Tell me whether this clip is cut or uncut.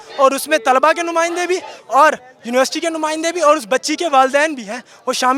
uncut